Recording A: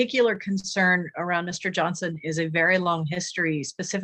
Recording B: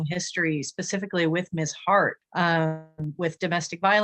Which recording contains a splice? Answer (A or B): B